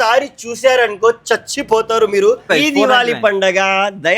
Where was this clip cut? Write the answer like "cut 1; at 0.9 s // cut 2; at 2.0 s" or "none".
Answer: cut 1; at 2.5 s